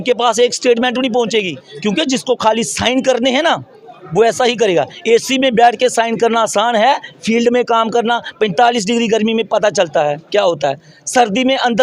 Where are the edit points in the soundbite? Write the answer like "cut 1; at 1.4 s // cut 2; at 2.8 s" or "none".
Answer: cut 1; at 1.6 s